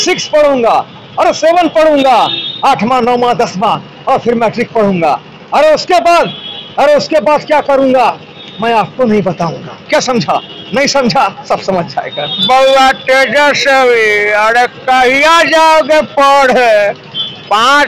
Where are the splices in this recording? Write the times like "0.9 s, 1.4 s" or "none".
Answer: 12.4 s